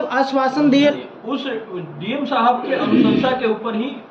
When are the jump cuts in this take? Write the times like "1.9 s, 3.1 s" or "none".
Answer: 0.9 s